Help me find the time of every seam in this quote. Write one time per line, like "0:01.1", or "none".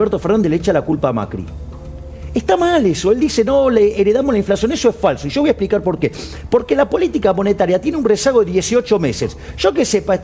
none